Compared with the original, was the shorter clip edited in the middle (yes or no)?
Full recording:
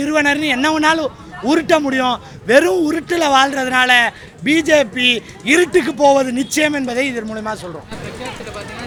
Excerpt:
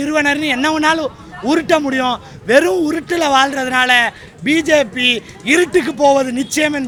no